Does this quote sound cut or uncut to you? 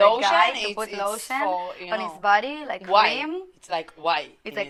uncut